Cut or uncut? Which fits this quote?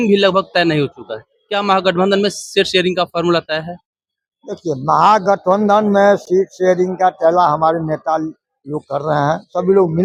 uncut